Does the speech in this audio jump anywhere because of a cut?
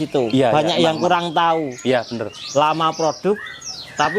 no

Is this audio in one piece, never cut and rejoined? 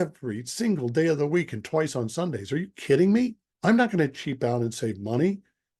no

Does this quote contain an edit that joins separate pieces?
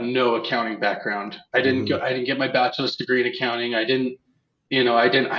no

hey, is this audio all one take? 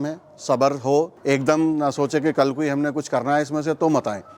no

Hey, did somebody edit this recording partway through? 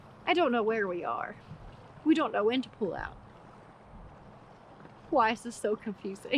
no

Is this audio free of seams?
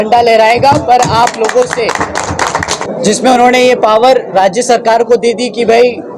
no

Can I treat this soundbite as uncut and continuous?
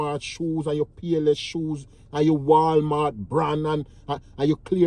yes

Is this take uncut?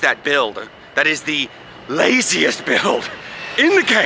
yes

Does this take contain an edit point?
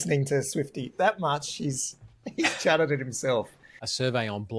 yes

